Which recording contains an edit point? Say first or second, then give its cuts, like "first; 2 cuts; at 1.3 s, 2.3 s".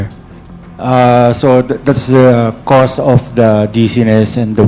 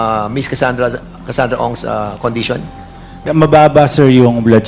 second; 1 cut; at 3.2 s